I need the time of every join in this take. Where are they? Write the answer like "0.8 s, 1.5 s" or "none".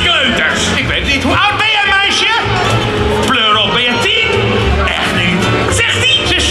none